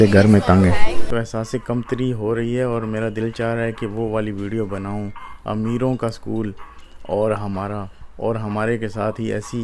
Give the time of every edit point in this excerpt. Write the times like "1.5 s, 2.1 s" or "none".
1.1 s